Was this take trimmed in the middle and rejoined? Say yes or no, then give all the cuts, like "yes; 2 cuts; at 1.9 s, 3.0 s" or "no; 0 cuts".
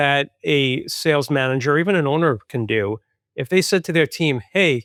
no; 0 cuts